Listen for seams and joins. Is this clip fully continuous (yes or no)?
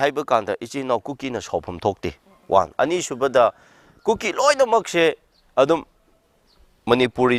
yes